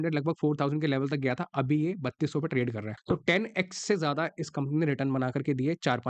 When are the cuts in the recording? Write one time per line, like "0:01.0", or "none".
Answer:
0:02.9